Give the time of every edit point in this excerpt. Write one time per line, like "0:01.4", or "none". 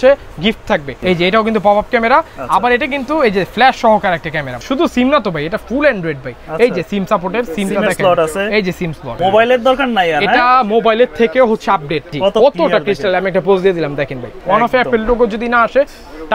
0:00.9
0:04.6
0:09.1
0:12.0
0:14.4

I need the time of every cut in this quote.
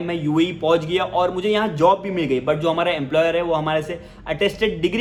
none

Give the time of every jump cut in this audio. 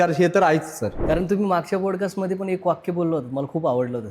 0:01.0

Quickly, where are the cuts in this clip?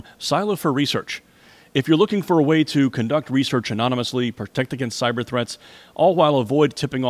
none

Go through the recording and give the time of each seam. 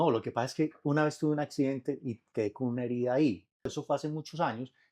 0:03.7

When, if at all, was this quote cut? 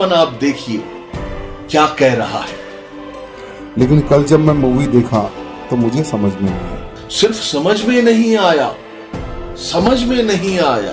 0:07.1

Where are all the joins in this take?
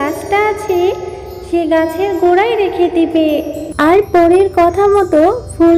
0:03.7

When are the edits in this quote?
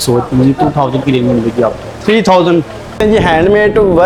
0:03.0

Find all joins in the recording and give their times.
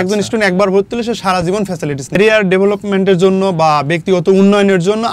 none

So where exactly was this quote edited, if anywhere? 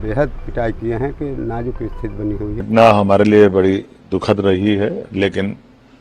0:02.6

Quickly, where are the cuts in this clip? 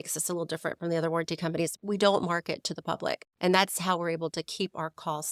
0:01.7
0:03.3

